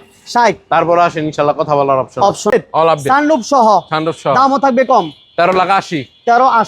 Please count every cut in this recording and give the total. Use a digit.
1